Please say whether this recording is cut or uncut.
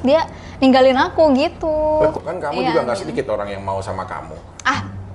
cut